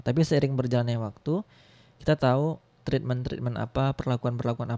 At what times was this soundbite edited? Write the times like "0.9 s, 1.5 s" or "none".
none